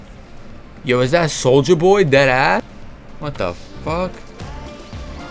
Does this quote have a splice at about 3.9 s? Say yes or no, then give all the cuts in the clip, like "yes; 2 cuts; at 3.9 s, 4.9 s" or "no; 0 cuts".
no; 1 cut; at 2.6 s